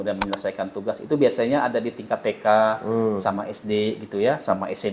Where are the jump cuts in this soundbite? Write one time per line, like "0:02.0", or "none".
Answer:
none